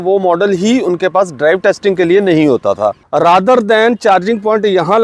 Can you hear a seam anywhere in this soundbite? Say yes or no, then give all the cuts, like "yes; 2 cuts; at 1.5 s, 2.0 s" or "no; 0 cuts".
yes; 1 cut; at 3.0 s